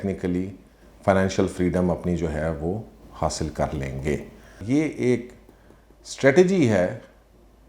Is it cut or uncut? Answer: cut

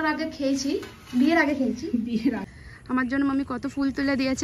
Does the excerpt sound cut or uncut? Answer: cut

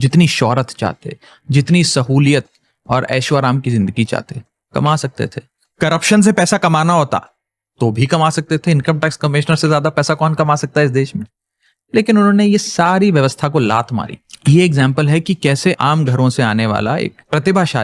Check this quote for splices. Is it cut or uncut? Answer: uncut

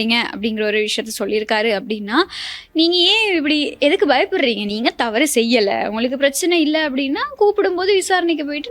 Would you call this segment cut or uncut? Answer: uncut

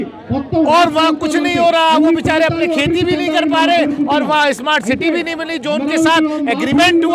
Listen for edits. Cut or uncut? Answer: uncut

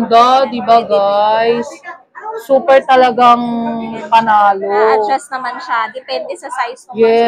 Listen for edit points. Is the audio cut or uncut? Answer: uncut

